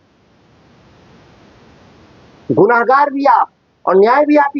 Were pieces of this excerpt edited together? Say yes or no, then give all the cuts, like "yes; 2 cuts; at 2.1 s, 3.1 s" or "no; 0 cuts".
no; 0 cuts